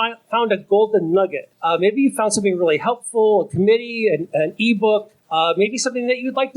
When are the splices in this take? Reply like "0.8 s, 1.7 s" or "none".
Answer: 1.5 s, 5.2 s

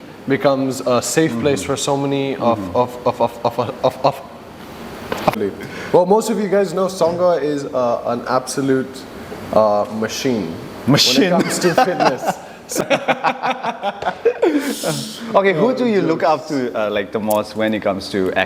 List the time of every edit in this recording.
5.3 s, 12.8 s

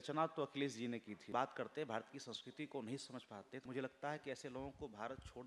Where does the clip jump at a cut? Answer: 1.3 s, 3.6 s

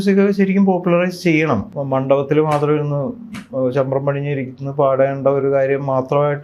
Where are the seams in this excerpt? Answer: 1.7 s

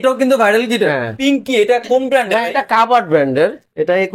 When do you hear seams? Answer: 1.1 s

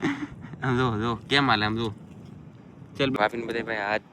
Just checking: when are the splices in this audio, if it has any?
3.2 s

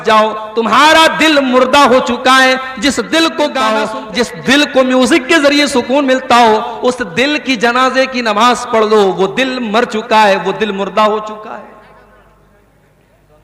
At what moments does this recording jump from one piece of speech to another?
3.8 s

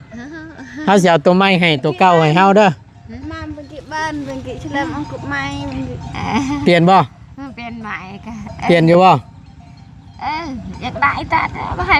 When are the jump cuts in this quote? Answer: none

